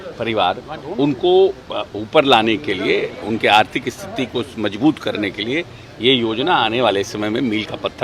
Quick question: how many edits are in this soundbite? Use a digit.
0